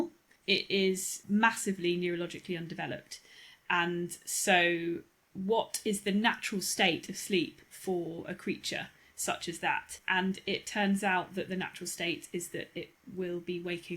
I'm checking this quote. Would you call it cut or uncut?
cut